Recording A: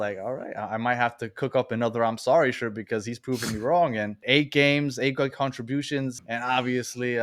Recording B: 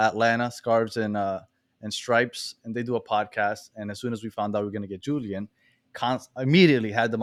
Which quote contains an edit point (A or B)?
A